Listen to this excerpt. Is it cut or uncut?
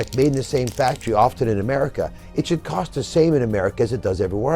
uncut